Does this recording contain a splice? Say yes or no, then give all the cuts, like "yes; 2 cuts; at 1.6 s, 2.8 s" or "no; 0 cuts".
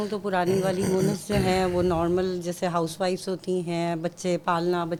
no; 0 cuts